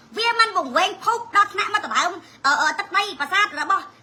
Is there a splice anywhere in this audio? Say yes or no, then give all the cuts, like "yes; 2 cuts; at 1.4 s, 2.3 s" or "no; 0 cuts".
no; 0 cuts